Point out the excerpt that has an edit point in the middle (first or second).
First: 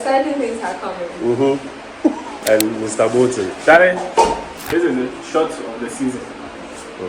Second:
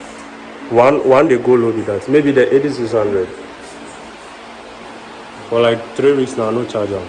first